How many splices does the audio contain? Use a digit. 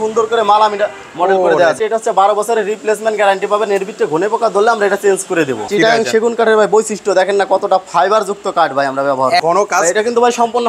3